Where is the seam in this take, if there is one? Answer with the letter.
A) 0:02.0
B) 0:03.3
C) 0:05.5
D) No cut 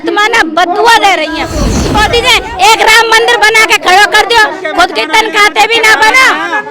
A